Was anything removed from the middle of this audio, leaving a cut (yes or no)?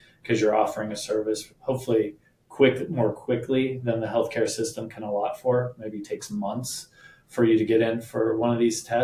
no